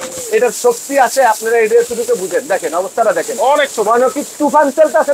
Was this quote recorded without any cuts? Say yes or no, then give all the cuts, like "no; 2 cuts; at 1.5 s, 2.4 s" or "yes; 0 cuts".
yes; 0 cuts